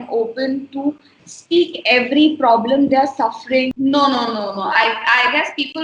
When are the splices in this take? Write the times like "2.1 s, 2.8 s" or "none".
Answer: 3.7 s